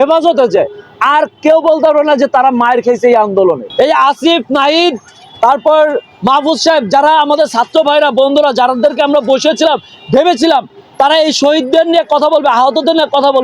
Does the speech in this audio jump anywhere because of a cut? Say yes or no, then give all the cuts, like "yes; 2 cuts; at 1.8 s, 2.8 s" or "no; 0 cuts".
yes; 1 cut; at 3.7 s